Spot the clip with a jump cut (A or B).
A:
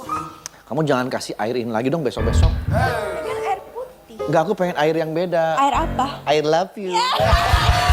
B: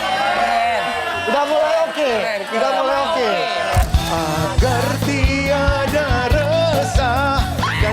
B